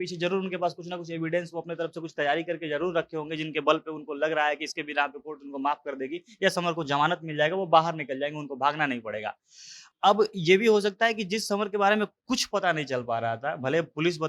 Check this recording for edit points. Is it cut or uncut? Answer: uncut